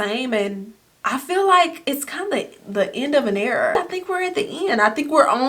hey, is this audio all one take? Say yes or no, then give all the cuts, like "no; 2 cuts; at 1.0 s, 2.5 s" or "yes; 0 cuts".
no; 1 cut; at 3.7 s